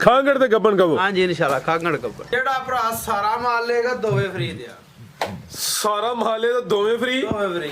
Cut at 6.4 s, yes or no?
no